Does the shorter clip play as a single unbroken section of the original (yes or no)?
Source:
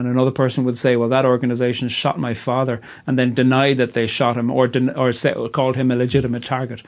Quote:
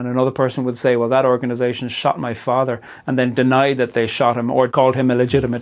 no